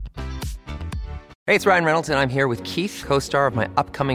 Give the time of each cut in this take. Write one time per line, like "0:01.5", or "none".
0:01.3